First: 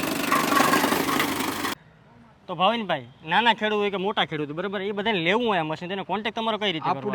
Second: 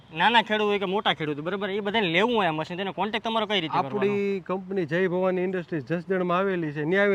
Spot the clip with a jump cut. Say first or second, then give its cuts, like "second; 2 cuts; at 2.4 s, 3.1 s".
first; 1 cut; at 2.2 s